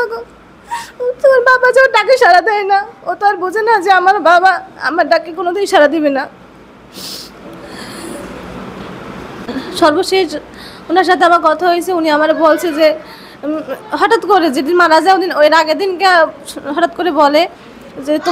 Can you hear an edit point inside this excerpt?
no; 0 cuts

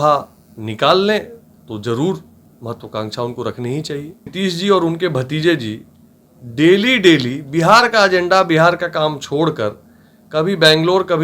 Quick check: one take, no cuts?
no; 1 cut; at 4.3 s

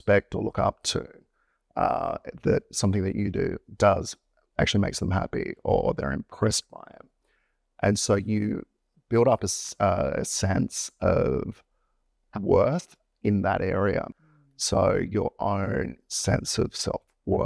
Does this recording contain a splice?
yes; 1 cut; at 14.5 s

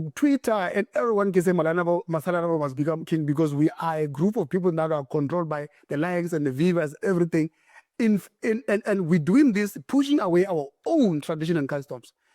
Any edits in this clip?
no; 0 cuts

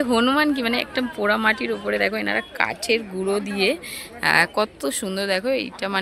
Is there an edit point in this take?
no; 0 cuts

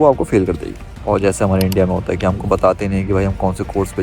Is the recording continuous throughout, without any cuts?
no; 1 cut; at 1.0 s

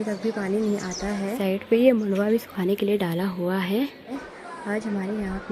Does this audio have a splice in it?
yes; 2 cuts; at 1.4 s, 4.1 s

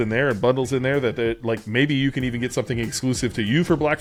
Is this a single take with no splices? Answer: yes; 0 cuts

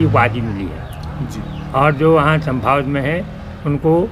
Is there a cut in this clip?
no; 0 cuts

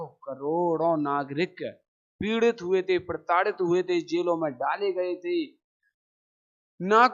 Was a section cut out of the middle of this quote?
no; 0 cuts

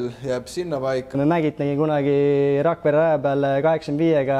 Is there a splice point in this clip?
yes; 1 cut; at 1.2 s

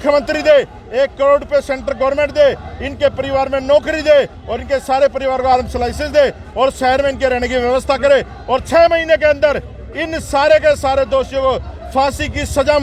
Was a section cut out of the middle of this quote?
no; 0 cuts

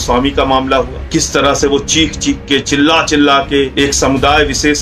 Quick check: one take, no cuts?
no; 2 cuts; at 1.0 s, 3.7 s

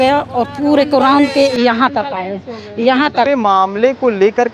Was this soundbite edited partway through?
yes; 1 cut; at 3.3 s

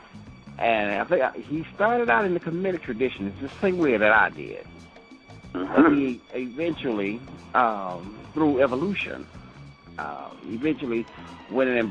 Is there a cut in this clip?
no; 0 cuts

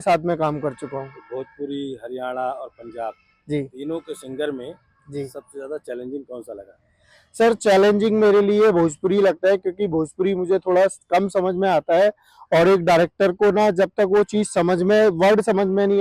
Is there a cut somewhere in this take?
no; 0 cuts

